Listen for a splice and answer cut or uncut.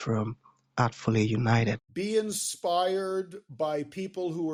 uncut